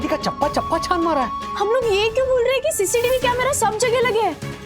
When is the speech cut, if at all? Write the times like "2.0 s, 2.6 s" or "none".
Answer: 1.4 s

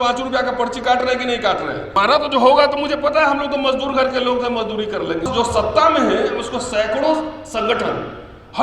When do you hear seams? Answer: 1.9 s, 5.3 s

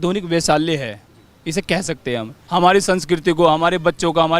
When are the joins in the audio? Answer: 2.4 s

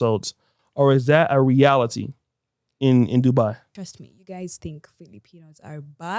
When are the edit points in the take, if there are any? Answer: 3.7 s

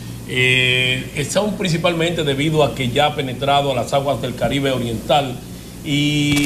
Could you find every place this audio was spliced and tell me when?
1.6 s

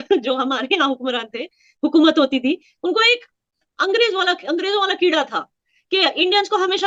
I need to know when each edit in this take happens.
none

